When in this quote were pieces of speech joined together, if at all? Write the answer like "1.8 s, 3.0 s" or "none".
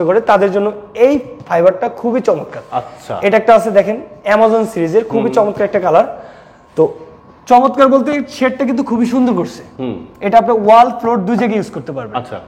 none